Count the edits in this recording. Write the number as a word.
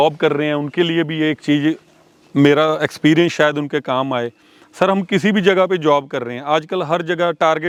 zero